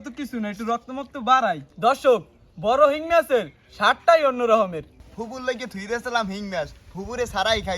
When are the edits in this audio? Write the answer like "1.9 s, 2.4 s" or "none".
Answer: 1.7 s, 4.9 s